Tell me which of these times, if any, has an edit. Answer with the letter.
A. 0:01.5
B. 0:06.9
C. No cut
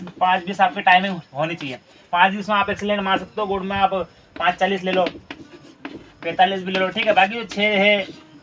C